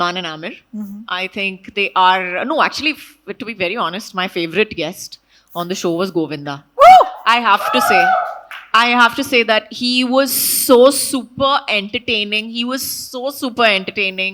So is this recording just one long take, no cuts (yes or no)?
yes